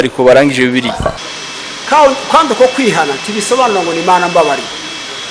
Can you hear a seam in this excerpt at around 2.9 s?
no; 1 cut; at 1.2 s

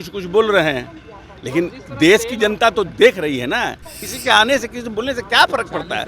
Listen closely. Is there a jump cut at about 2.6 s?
no; 1 cut; at 4.1 s

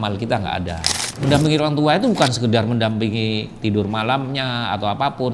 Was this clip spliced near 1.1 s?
yes; 1 cut; at 1.1 s

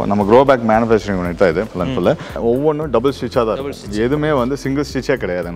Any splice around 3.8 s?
no; 1 cut; at 2.4 s

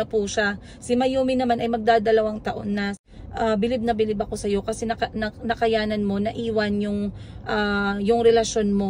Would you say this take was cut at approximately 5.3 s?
no; 1 cut; at 3.0 s

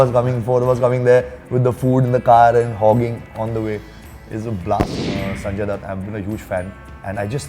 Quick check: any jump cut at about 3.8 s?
no; 1 cut; at 5.1 s

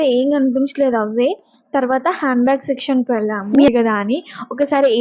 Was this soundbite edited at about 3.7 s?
yes; 1 cut; at 3.7 s

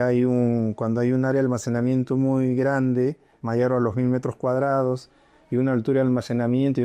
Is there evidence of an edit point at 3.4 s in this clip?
no; 0 cuts

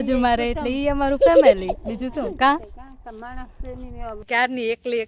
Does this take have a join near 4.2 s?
yes; 1 cut; at 4.2 s

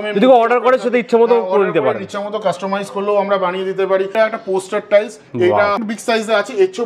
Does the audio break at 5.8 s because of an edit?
yes; 2 cuts; at 4.1 s, 5.8 s

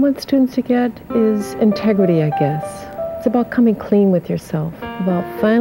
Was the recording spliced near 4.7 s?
yes; 1 cut; at 4.7 s

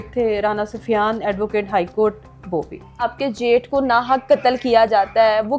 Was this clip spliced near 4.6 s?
no; 1 cut; at 3.0 s

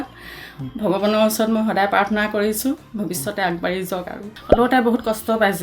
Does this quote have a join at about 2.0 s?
no; 1 cut; at 4.2 s

